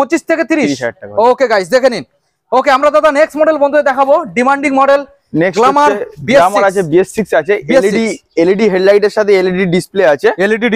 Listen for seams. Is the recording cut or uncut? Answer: uncut